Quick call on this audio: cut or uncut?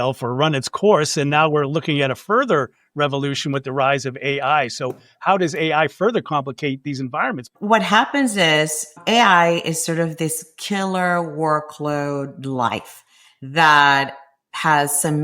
cut